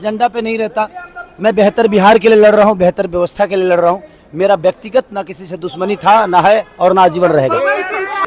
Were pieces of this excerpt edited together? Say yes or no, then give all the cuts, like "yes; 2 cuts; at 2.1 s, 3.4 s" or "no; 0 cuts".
no; 0 cuts